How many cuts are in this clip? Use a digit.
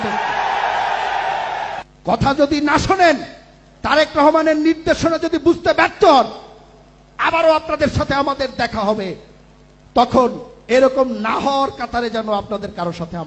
1